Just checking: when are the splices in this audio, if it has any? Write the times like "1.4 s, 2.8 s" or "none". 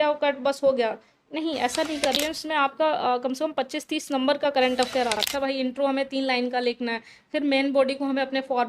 2.0 s, 5.2 s

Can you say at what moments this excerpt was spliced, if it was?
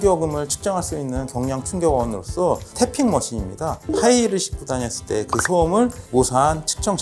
none

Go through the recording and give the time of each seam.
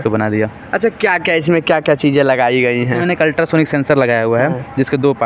none

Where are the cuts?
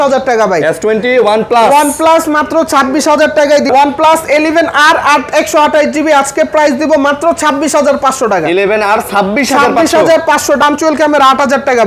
3.7 s, 10.6 s

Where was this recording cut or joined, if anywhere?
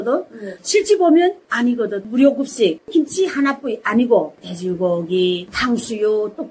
2.8 s, 5.5 s

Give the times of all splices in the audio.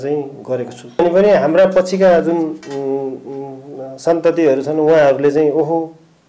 1.0 s

